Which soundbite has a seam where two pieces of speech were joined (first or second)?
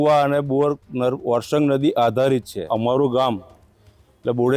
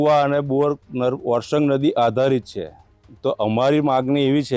first